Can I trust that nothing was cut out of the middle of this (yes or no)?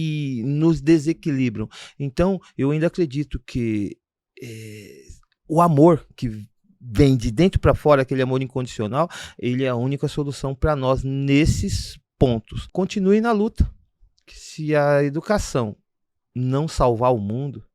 no